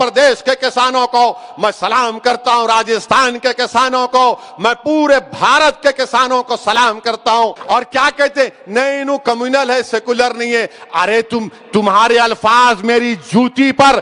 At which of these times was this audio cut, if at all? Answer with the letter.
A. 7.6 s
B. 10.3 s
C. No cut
A